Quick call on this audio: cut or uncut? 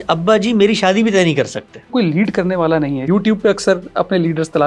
cut